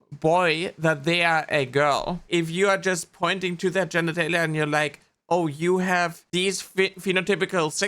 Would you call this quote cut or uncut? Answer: cut